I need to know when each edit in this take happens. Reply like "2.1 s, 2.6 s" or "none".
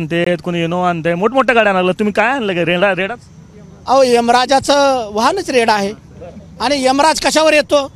none